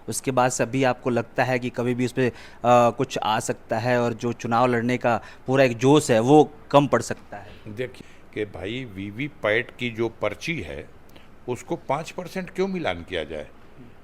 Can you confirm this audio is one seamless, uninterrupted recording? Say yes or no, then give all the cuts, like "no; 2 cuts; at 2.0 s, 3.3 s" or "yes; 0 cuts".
no; 1 cut; at 7.9 s